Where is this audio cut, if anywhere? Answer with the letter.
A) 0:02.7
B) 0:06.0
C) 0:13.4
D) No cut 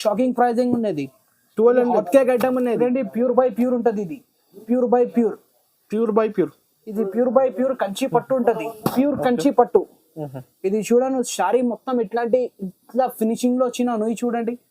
A